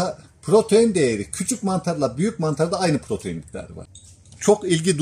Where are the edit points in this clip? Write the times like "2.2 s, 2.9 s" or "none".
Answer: 3.8 s